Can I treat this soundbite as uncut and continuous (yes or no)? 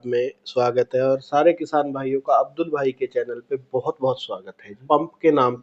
no